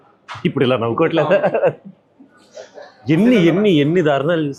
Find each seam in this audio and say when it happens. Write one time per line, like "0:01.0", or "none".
none